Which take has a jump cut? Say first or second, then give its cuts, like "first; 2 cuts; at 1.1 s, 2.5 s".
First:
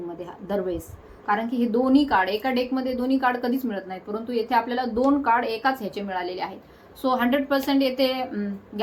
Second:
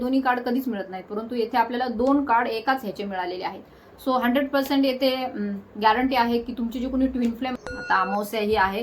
second; 1 cut; at 7.5 s